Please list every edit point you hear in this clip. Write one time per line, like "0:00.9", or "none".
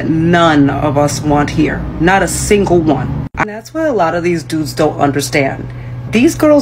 0:03.3